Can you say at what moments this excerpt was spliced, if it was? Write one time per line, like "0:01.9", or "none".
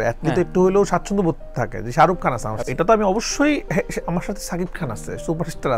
0:02.6